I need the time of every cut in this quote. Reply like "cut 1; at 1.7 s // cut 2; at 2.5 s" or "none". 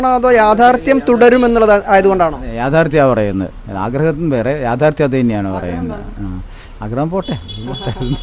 none